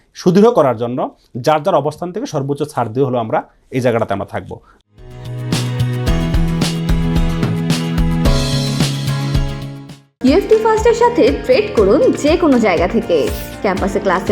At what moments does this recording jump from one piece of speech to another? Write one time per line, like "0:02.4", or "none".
0:04.7